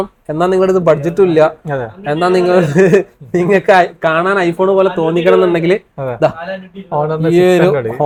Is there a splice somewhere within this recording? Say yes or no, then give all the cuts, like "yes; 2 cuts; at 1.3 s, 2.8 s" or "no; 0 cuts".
no; 0 cuts